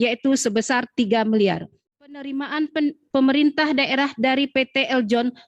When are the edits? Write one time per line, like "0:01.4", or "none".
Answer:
0:02.1